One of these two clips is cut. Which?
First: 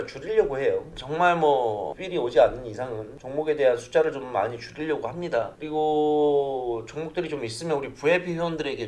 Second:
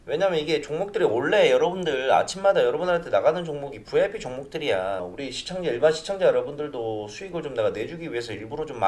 second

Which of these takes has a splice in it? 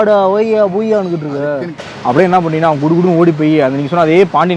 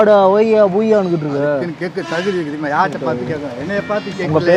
first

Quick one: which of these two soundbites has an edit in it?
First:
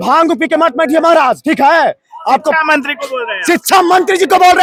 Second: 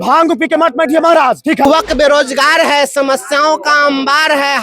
second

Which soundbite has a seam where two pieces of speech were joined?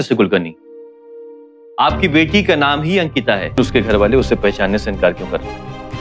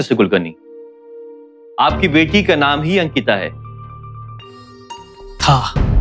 first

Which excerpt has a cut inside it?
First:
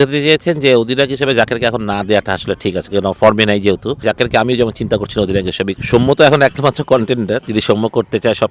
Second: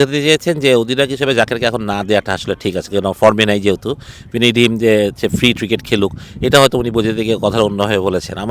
first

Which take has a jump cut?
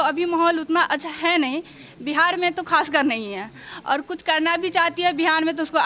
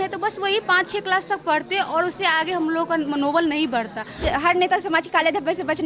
second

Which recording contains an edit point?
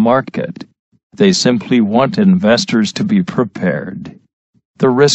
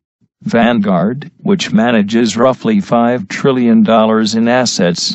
first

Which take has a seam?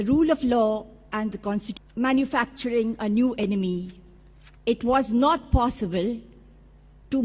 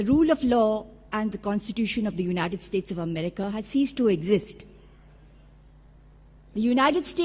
second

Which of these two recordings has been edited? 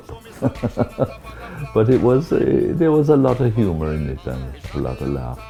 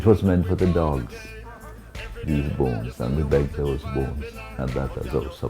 second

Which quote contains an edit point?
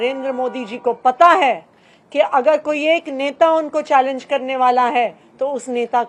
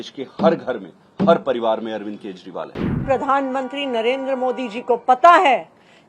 second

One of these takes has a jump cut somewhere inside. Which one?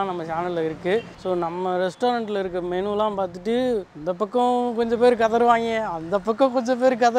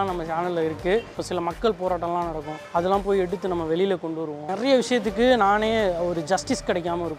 second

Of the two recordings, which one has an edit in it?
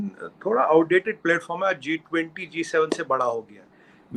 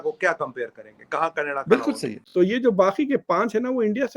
second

